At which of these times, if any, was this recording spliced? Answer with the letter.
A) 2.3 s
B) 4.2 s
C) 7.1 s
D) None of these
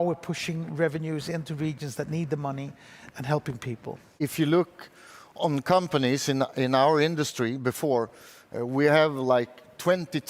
B